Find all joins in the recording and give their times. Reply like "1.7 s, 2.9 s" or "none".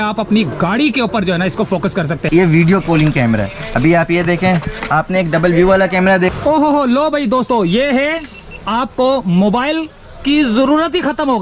2.2 s, 6.3 s